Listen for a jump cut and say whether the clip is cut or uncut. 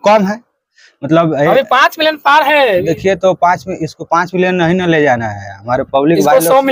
uncut